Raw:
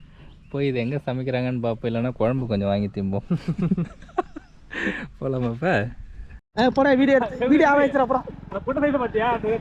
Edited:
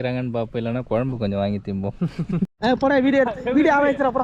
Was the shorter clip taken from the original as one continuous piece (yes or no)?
no